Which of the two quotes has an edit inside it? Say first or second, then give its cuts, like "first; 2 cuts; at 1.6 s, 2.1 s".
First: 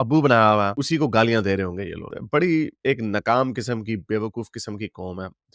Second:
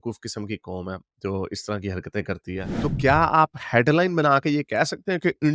second; 1 cut; at 2.7 s